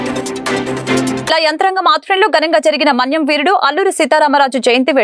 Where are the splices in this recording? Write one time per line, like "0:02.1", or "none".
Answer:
none